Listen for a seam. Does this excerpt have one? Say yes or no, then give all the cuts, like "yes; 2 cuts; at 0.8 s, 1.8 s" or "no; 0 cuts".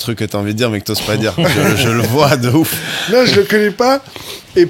no; 0 cuts